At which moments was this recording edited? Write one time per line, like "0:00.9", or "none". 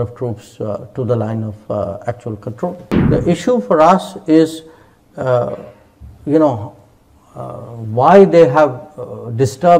0:02.9